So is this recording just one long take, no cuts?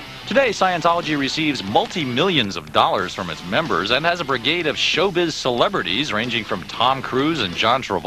no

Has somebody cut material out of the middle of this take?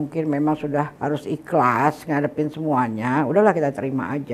yes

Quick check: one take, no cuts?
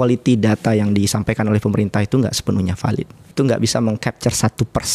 no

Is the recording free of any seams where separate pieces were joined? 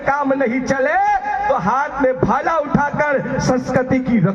yes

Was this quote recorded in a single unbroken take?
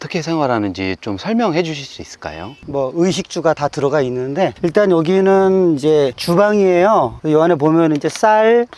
yes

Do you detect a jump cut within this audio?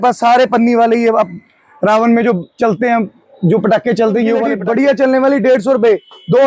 no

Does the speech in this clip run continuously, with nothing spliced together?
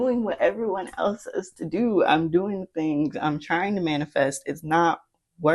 yes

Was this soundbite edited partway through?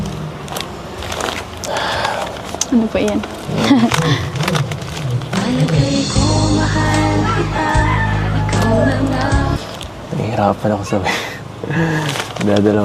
no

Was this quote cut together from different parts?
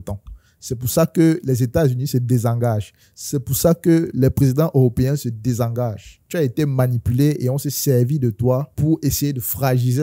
no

